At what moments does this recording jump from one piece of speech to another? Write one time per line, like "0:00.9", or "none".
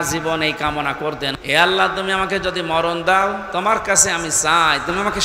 0:01.3

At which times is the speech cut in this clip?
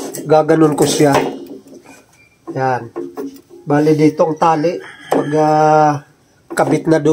0:03.5

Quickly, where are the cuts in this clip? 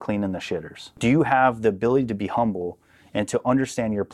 0:01.0

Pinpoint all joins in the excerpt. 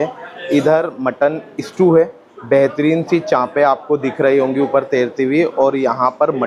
none

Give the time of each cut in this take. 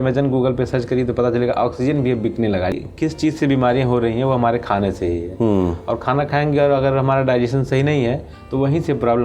0:02.8

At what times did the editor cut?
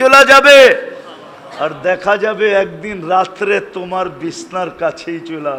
none

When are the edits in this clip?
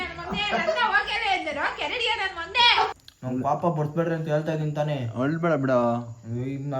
0:03.1

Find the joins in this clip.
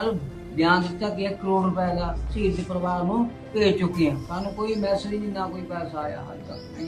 none

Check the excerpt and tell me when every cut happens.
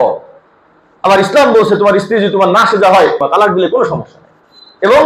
0:03.2

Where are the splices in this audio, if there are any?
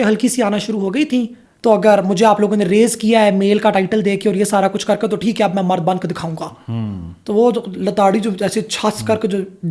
0:01.4

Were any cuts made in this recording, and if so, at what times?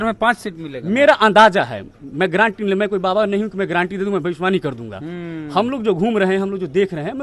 none

